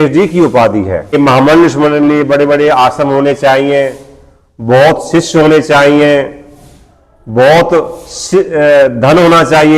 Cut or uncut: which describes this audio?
cut